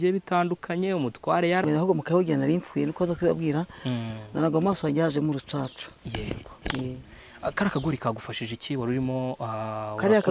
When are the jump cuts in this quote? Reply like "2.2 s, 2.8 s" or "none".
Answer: 1.6 s